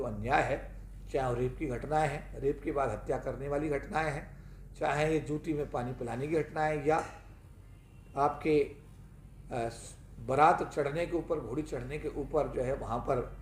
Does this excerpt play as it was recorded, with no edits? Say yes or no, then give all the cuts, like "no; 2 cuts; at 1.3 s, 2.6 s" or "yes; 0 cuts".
yes; 0 cuts